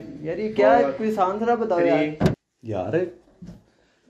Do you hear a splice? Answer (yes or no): yes